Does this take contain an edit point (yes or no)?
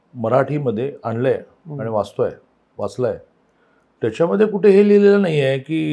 no